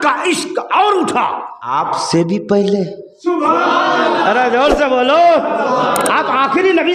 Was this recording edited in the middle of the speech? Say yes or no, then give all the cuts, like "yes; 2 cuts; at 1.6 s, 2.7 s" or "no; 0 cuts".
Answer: yes; 1 cut; at 1.6 s